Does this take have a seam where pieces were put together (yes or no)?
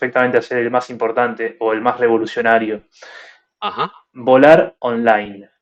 no